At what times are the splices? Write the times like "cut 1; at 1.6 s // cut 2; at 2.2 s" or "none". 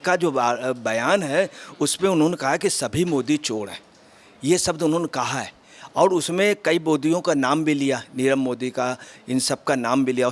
none